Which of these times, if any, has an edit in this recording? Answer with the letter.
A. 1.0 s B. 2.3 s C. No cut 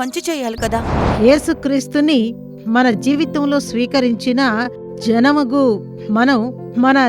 A